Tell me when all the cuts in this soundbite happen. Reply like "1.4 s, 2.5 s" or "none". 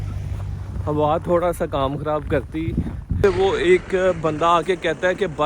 3.2 s